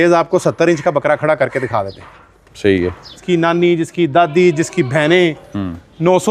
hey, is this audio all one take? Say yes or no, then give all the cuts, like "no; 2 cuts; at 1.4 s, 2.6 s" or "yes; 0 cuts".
no; 1 cut; at 3.2 s